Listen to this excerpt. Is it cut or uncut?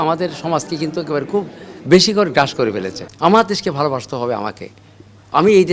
cut